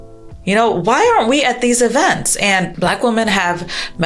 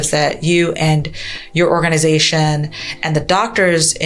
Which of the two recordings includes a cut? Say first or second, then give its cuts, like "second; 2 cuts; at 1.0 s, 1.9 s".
first; 1 cut; at 2.7 s